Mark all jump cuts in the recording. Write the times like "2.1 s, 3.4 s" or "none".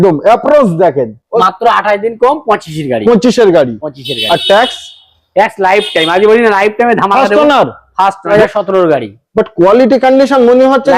1.4 s, 8.3 s